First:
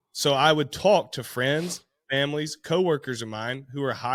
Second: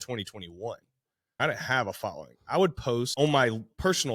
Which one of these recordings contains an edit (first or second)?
second